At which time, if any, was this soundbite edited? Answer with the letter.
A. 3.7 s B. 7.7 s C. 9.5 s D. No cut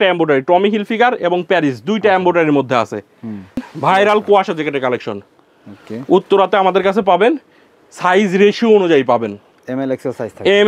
A